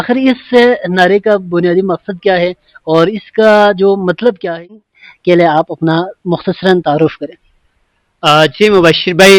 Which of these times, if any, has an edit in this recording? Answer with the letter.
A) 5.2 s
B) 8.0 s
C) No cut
A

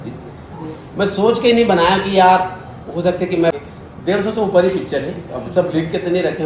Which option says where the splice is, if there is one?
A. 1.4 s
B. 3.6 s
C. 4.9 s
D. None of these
B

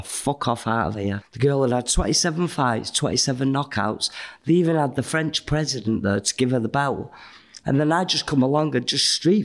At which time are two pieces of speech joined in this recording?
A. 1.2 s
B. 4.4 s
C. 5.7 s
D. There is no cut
A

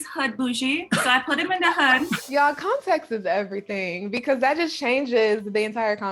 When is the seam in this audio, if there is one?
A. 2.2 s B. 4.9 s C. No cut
A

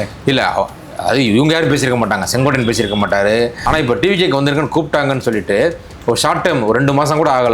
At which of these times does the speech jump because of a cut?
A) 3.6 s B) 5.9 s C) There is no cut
A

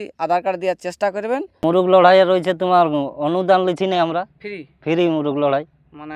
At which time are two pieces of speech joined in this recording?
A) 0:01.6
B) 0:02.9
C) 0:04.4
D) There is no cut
A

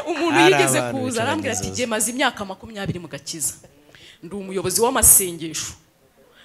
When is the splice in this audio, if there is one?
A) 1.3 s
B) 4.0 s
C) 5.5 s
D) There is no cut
D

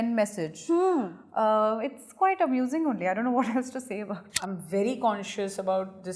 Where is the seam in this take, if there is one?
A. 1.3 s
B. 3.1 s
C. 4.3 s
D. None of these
C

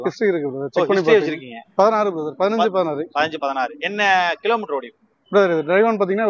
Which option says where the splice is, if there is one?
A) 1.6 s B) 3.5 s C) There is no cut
A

